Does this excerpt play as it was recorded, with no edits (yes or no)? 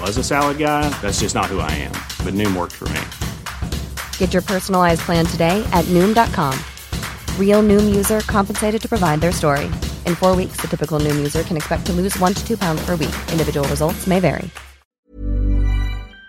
no